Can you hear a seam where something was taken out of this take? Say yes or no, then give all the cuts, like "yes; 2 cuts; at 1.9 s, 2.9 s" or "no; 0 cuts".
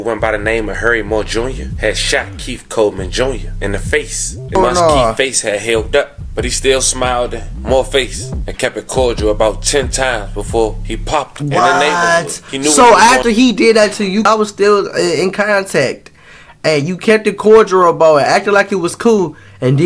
yes; 2 cuts; at 4.5 s, 14.3 s